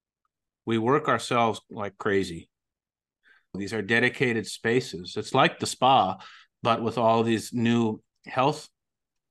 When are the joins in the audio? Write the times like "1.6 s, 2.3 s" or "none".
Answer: 3.5 s